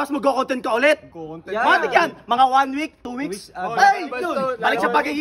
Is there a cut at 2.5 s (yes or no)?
no